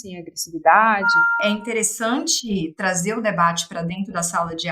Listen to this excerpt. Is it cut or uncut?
cut